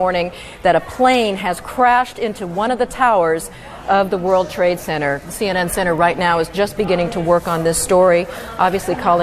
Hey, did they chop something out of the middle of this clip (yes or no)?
no